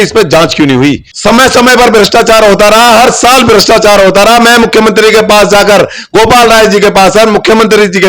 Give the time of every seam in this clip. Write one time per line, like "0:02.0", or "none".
0:01.1